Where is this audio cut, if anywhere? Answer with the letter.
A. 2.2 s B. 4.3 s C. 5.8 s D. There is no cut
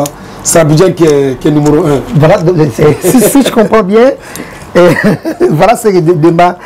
D